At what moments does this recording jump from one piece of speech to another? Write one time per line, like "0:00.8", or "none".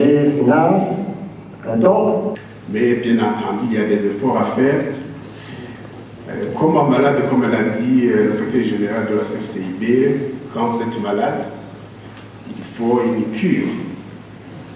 0:02.4